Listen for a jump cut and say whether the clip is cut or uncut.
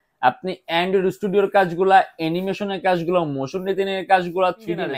uncut